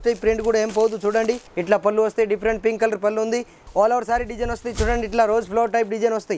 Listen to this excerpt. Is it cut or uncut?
cut